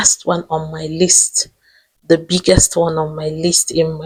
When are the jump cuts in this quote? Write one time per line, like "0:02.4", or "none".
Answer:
none